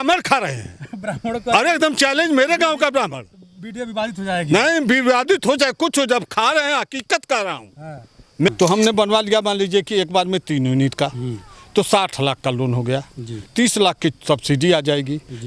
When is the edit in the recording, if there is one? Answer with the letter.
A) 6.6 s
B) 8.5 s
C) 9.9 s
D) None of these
B